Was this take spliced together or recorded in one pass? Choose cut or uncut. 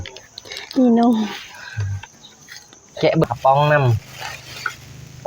cut